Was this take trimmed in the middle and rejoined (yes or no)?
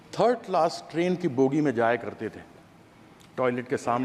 no